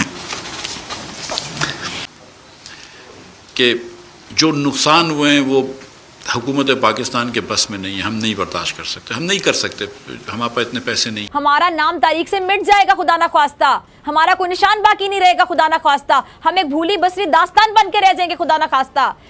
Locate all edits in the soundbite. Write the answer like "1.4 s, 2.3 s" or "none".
2.1 s, 11.1 s